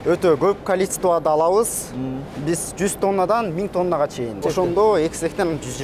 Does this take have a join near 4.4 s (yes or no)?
yes